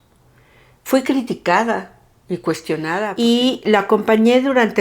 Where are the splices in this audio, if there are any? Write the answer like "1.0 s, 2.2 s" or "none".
3.1 s